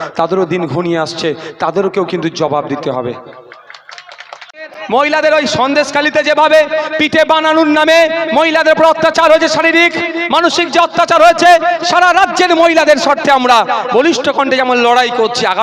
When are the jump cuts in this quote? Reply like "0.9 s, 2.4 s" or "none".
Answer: 4.8 s

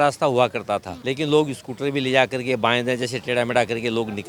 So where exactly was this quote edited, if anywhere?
1.0 s

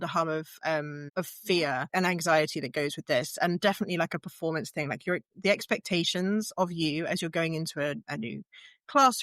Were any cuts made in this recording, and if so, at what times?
1.0 s, 1.9 s

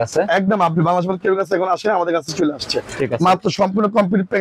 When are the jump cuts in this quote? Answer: none

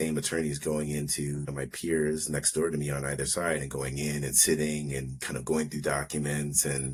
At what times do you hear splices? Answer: none

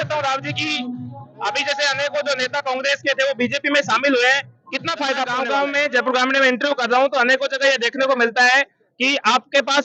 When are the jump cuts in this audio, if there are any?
5.2 s

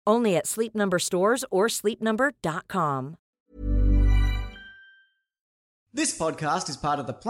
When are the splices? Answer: 5.5 s

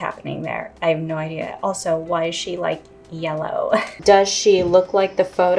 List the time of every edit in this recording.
3.9 s

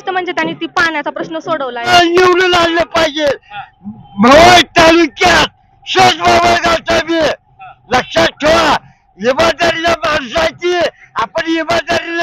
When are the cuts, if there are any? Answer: 1.9 s

